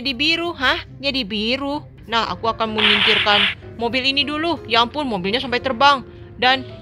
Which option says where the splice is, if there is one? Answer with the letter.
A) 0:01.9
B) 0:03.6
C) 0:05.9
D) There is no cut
A